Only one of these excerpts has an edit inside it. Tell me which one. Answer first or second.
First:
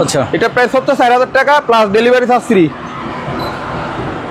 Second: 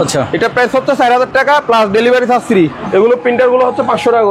second